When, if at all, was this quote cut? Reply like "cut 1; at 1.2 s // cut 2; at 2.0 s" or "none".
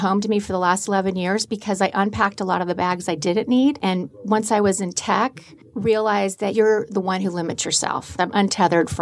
cut 1; at 3.8 s // cut 2; at 6.5 s // cut 3; at 8.1 s

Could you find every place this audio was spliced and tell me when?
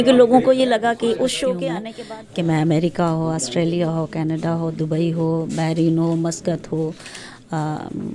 cut 1; at 1.9 s

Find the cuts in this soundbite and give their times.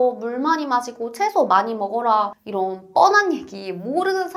none

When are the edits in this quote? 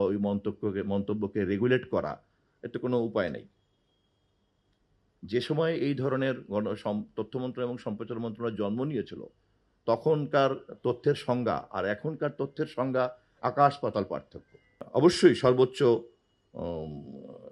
cut 1; at 14.8 s

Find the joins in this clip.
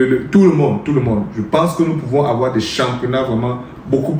none

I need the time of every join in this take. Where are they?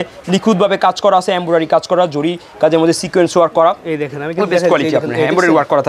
none

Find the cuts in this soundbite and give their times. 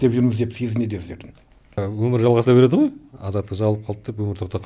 cut 1; at 1.8 s

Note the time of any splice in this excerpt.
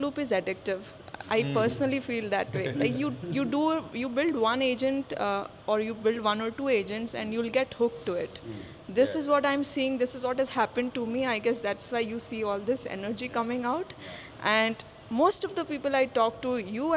none

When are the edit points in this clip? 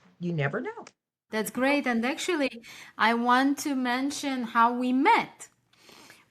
cut 1; at 1.3 s

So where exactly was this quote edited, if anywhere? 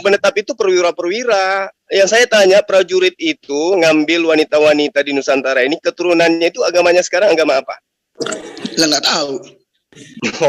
none

